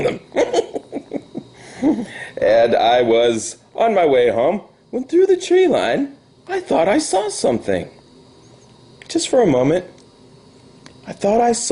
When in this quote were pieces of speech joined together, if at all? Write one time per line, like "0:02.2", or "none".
none